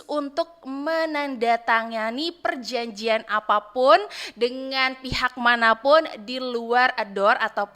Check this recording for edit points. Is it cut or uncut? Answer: uncut